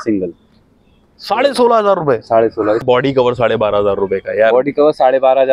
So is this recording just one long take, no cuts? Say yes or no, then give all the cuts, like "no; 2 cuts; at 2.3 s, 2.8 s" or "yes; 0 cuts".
no; 1 cut; at 2.8 s